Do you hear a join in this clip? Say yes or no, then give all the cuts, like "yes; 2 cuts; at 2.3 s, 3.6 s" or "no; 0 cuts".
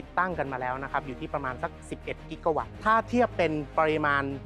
yes; 2 cuts; at 2.7 s, 3.7 s